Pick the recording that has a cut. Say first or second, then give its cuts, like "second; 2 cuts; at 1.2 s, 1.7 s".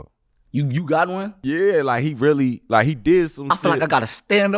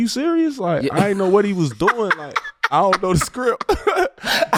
first; 1 cut; at 1.3 s